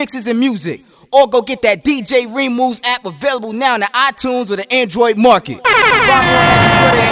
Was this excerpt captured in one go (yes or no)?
no